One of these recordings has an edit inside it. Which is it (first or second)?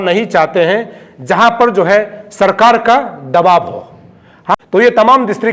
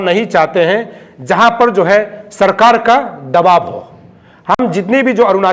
first